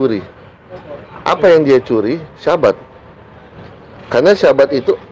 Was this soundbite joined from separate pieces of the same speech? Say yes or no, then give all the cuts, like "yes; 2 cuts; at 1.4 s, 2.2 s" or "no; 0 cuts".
no; 0 cuts